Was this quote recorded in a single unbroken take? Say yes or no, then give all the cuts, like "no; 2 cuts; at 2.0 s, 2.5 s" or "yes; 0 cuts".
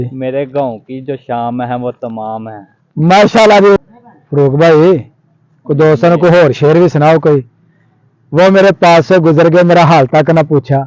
no; 1 cut; at 3.8 s